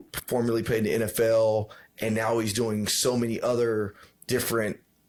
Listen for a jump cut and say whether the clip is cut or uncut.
uncut